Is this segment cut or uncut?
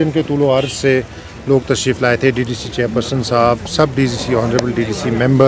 uncut